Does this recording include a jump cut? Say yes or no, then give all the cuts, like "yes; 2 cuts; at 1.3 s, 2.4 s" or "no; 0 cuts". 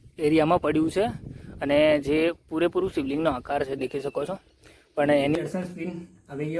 yes; 1 cut; at 5.4 s